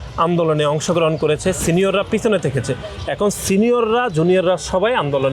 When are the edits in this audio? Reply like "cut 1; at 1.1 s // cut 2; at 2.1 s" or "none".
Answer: none